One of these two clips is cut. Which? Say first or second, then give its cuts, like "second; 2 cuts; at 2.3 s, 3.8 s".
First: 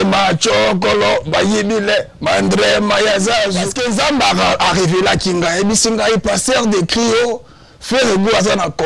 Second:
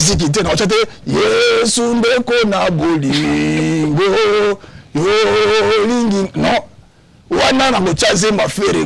first; 1 cut; at 3.7 s